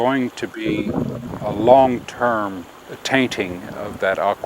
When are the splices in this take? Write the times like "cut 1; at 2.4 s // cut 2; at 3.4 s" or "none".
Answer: cut 1; at 1.2 s // cut 2; at 2.9 s